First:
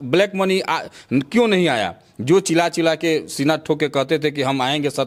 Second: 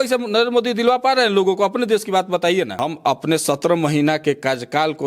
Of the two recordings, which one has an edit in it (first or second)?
second